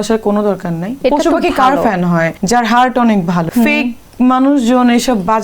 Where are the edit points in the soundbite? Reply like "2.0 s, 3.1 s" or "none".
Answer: 1.0 s, 2.4 s, 3.4 s